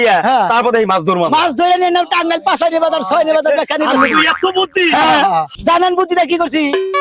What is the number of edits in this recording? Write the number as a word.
one